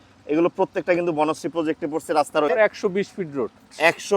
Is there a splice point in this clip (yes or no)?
no